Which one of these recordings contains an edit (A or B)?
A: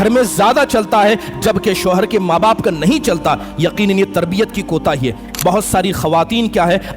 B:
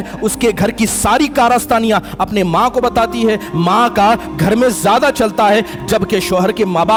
A